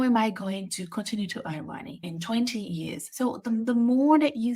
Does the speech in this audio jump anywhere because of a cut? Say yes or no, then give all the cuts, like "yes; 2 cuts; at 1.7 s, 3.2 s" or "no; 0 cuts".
yes; 2 cuts; at 2.1 s, 3.0 s